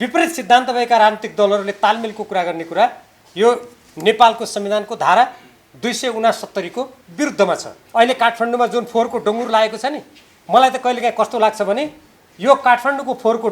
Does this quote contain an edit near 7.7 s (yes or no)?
yes